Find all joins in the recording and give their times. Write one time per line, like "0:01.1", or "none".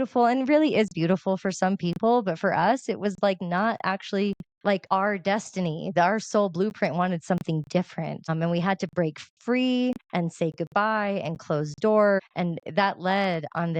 0:04.7
0:08.3
0:10.0
0:12.2